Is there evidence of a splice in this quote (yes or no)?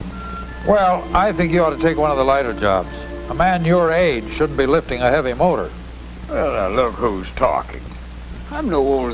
yes